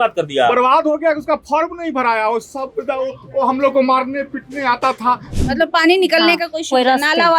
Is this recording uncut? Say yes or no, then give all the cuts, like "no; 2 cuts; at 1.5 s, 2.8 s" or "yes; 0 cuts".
no; 1 cut; at 5.3 s